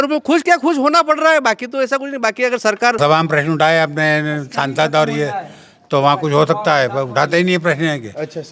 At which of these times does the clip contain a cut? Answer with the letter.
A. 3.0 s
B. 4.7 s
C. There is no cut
A